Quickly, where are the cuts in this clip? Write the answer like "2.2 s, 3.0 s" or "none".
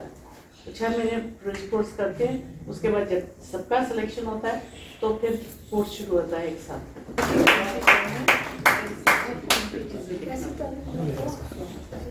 7.2 s